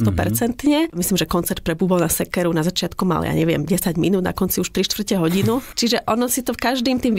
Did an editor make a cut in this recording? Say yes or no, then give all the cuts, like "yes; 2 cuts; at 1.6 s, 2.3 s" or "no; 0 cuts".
yes; 1 cut; at 0.9 s